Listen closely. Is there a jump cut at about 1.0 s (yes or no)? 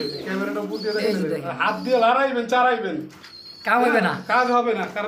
no